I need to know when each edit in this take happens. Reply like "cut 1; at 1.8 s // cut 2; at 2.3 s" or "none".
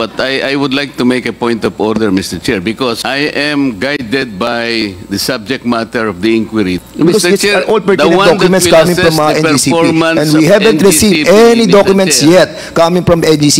cut 1; at 3.0 s // cut 2; at 6.8 s